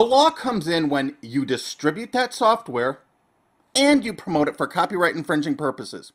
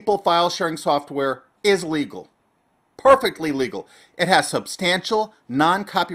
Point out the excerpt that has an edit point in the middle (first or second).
second